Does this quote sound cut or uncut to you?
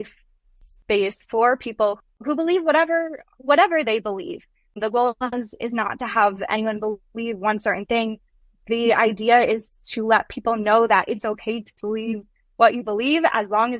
cut